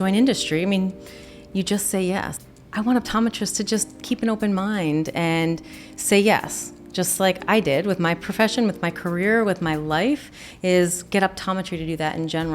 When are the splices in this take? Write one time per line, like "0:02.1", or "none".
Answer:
0:02.3

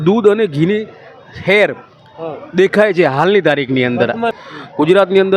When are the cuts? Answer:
0:04.4

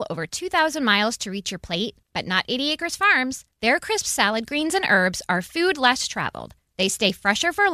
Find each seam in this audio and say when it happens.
none

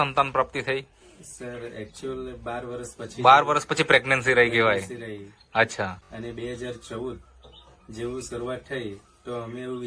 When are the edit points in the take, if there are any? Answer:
0:06.1

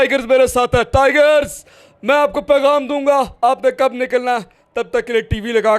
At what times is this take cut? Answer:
none

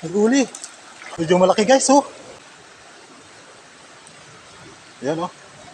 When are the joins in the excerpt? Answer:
0:01.0
0:02.4

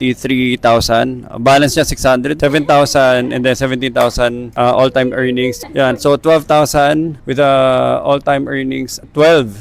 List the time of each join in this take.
0:02.4
0:05.6

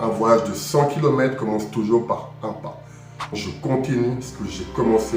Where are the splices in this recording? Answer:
0:03.2

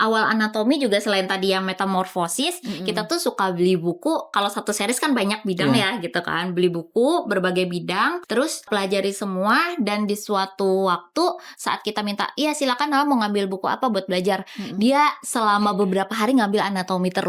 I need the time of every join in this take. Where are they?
0:04.3
0:08.7

